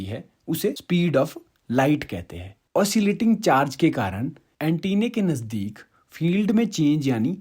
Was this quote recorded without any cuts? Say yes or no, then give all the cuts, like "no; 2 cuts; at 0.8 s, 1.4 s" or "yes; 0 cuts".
no; 1 cut; at 2.5 s